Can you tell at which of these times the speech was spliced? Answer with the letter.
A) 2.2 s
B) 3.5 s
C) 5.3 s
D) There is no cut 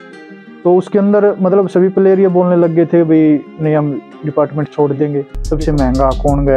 C